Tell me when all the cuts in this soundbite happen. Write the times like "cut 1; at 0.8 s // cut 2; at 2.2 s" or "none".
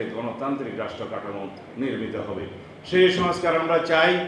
none